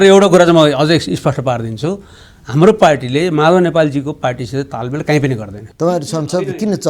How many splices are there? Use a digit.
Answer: 1